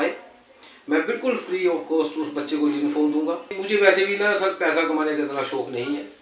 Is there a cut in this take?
yes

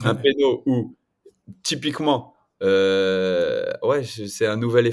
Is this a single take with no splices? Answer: yes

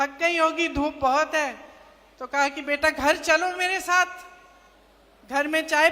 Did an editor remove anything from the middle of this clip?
no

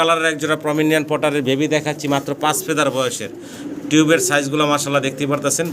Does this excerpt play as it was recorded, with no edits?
yes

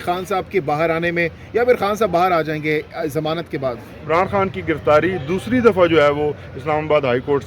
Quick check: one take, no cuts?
no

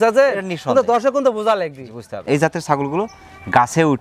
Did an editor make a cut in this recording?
yes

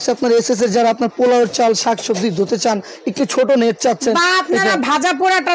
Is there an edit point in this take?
no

